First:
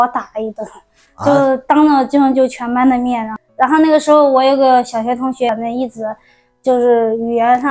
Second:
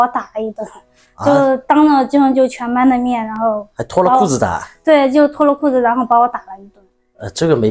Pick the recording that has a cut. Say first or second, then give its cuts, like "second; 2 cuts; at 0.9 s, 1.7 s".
first; 2 cuts; at 3.3 s, 5.5 s